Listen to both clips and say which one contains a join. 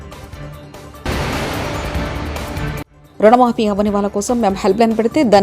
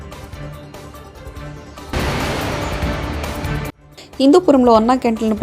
second; 3 cuts; at 0.9 s, 1.9 s, 3.8 s

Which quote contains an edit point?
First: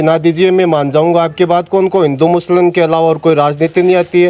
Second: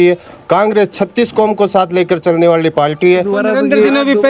second; 1 cut; at 3.4 s

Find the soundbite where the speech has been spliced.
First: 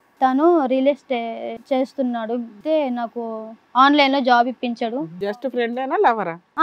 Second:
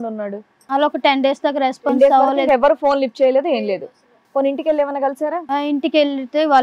first; 3 cuts; at 1.5 s, 2.6 s, 5.3 s

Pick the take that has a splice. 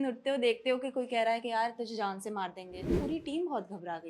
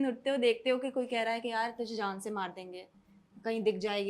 first; 1 cut; at 2.9 s

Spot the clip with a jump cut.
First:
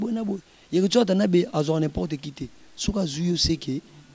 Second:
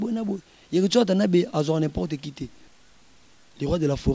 second; 1 cut; at 2.7 s

